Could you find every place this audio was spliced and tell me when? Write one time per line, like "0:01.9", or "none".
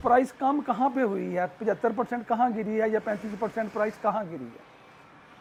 none